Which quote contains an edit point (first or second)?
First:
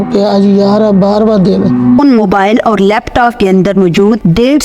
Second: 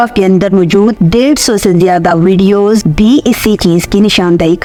first